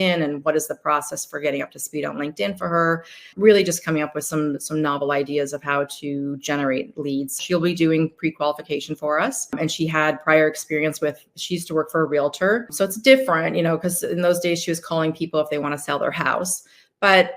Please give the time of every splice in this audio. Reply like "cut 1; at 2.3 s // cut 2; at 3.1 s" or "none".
cut 1; at 3.3 s // cut 2; at 7.4 s // cut 3; at 9.6 s // cut 4; at 12.7 s